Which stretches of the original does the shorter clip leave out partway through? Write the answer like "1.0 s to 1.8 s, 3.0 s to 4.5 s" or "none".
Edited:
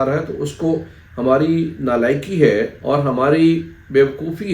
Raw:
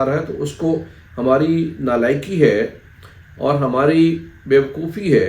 2.8 s to 3.3 s